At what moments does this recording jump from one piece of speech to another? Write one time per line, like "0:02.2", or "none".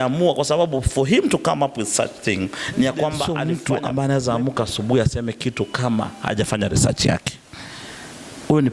0:03.4

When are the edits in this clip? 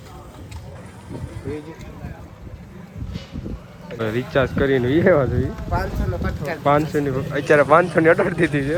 none

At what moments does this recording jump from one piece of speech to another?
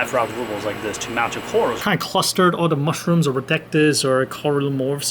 0:01.8

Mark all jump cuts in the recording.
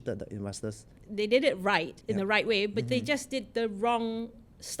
0:00.9
0:01.9

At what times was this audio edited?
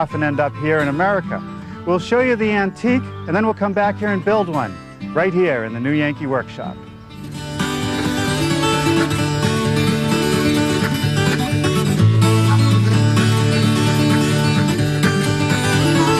none

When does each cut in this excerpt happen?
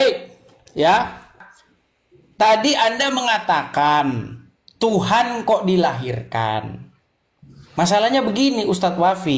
0:01.4

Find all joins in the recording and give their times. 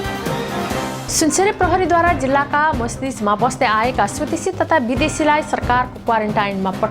none

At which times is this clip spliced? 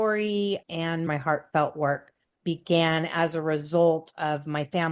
0:01.1

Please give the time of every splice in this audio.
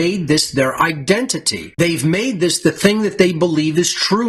none

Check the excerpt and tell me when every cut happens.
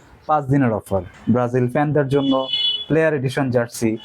0:01.1

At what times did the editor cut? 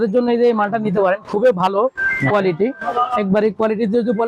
none

